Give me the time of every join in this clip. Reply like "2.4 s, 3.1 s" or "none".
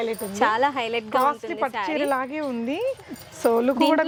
none